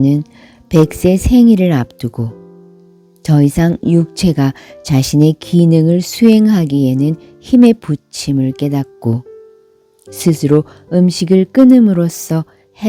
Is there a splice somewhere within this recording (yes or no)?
no